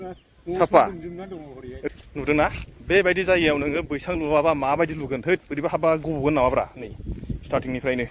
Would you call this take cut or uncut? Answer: cut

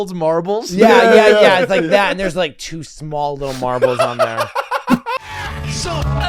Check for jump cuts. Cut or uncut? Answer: cut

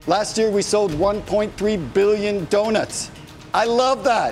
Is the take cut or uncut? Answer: uncut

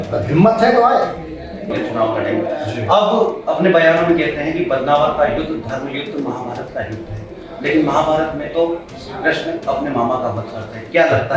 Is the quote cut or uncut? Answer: cut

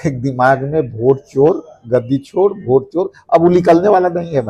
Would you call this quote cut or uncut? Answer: uncut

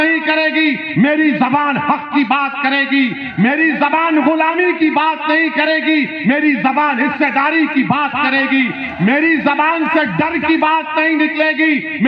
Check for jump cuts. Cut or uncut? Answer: uncut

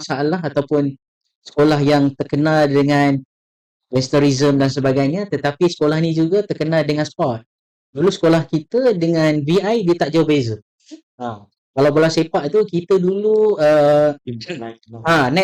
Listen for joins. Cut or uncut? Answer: uncut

